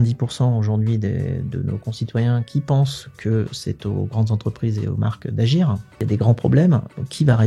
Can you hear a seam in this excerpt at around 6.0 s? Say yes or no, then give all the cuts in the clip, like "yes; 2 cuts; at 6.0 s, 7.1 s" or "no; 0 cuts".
yes; 1 cut; at 6.0 s